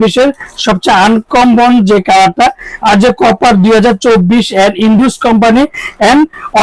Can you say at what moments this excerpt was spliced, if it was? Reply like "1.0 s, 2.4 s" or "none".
none